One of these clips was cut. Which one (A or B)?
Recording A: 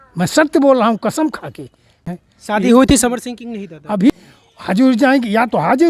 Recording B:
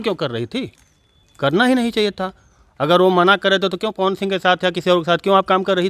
A